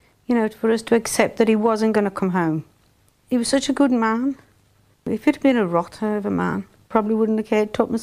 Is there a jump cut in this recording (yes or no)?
yes